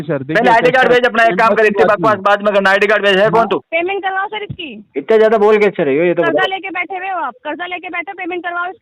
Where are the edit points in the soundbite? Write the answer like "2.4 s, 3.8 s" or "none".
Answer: 3.7 s